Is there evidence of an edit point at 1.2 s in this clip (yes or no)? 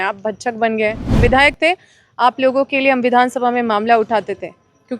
yes